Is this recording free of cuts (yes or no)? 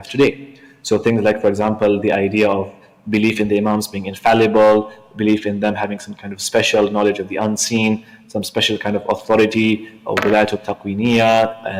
yes